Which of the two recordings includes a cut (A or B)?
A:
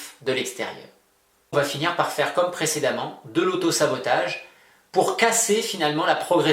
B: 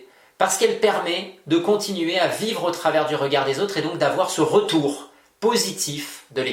A